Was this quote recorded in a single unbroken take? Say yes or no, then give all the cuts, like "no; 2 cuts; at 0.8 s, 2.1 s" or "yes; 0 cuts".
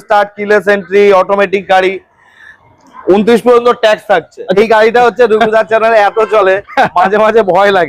no; 1 cut; at 4.5 s